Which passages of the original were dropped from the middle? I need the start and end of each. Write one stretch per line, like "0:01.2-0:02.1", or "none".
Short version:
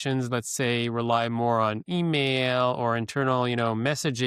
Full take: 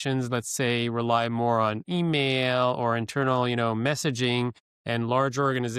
none